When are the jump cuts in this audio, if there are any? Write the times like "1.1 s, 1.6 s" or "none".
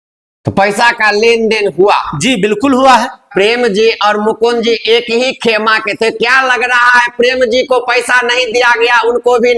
3.3 s